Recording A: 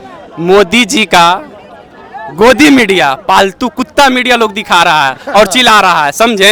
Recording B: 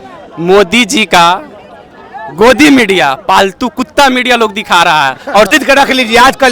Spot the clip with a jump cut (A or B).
B